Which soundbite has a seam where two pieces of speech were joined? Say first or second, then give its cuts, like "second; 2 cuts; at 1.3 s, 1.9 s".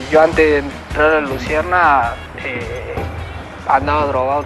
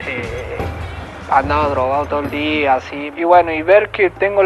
second; 1 cut; at 3.0 s